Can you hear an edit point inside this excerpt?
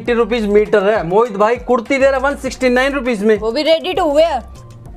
no; 0 cuts

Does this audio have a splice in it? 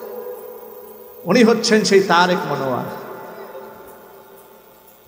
no; 0 cuts

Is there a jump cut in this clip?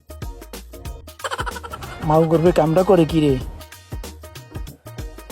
yes; 1 cut; at 1.0 s

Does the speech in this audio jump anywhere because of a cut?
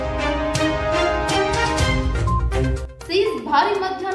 yes; 1 cut; at 2.9 s

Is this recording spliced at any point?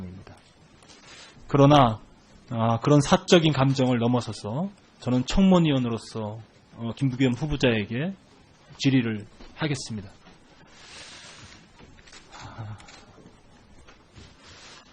no; 0 cuts

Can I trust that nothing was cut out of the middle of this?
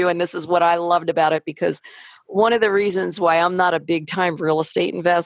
yes; 0 cuts

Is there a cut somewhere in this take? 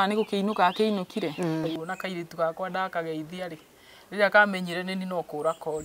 yes; 1 cut; at 1.9 s

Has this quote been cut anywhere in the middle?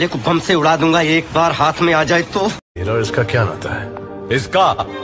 yes; 1 cut; at 2.6 s

